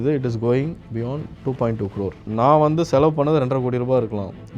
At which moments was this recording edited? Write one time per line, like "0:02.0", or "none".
0:02.2